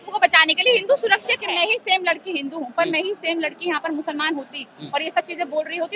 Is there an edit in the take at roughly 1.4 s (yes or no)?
yes